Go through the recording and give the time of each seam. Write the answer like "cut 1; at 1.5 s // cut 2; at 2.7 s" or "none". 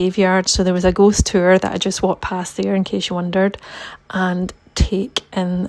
none

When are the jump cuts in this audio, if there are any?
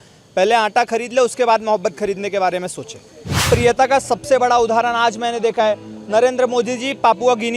cut 1; at 3.3 s

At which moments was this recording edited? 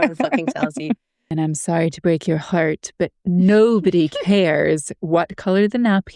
cut 1; at 1.2 s

